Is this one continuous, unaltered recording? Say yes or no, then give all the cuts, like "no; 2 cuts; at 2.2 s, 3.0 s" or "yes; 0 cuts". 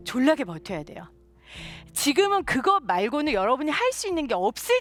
yes; 0 cuts